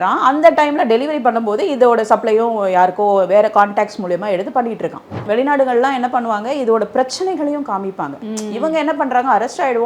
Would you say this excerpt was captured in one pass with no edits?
no; 1 cut; at 5.2 s

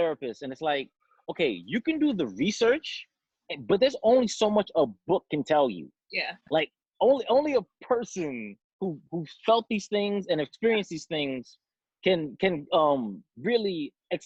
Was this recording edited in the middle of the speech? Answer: no; 0 cuts

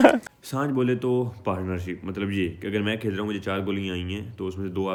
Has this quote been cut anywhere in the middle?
no; 0 cuts

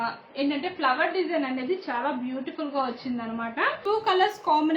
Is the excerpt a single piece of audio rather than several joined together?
no; 1 cut; at 3.8 s

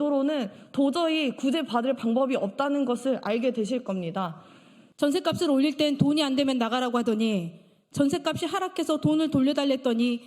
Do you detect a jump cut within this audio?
yes; 1 cut; at 4.8 s

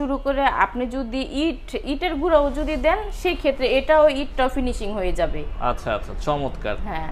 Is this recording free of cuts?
yes; 0 cuts

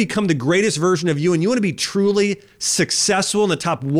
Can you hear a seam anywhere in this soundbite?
no; 0 cuts

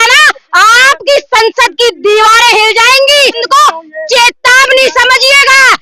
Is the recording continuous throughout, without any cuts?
no; 1 cut; at 3.4 s

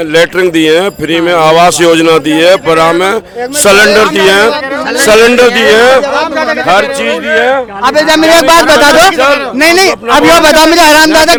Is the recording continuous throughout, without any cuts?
yes; 0 cuts

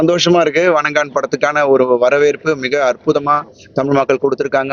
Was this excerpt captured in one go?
yes; 0 cuts

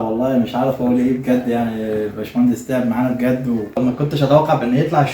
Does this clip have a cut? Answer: yes; 1 cut; at 3.8 s

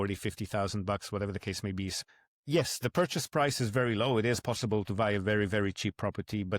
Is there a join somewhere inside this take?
yes; 1 cut; at 1.9 s

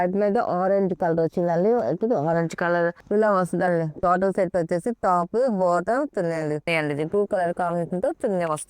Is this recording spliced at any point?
yes; 2 cuts; at 3.0 s, 6.7 s

